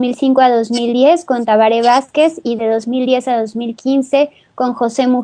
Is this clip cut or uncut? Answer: uncut